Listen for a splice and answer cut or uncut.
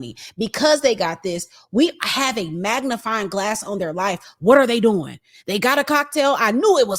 uncut